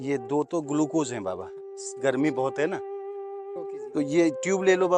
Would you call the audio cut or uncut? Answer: uncut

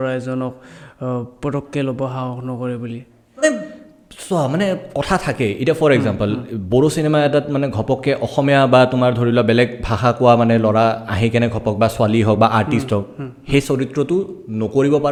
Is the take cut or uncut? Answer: uncut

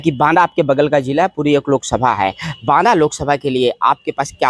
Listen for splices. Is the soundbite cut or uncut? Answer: uncut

